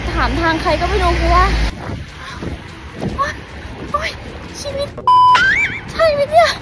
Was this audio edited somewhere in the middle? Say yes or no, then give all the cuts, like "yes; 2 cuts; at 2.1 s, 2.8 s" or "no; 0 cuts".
yes; 1 cut; at 1.8 s